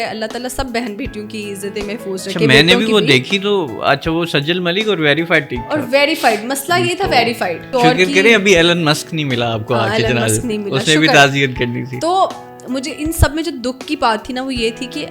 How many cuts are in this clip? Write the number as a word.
one